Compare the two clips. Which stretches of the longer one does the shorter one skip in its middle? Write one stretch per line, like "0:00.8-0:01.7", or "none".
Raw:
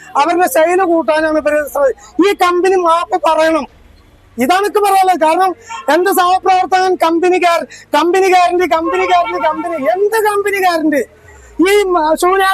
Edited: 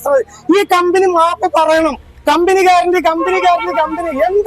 0:03.8-0:07.8